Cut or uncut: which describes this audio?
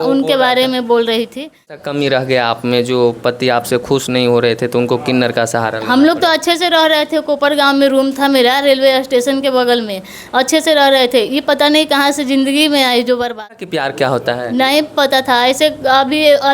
cut